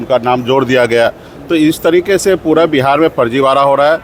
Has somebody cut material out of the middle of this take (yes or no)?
no